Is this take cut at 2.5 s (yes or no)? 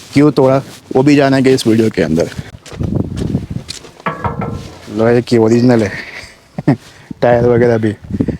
yes